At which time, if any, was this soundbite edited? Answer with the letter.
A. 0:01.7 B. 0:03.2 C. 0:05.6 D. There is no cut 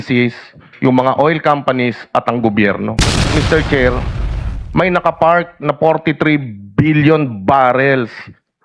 B